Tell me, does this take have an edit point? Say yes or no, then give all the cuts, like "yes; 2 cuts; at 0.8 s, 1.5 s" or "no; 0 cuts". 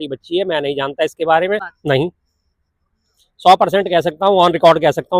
yes; 1 cut; at 1.7 s